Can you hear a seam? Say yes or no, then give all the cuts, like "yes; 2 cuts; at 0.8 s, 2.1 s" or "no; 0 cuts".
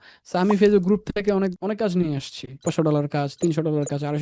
yes; 2 cuts; at 1.6 s, 2.7 s